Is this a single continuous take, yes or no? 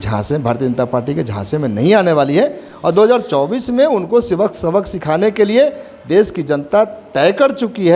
yes